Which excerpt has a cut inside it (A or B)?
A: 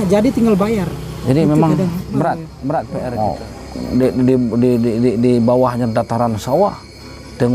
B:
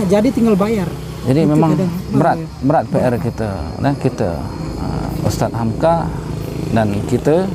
A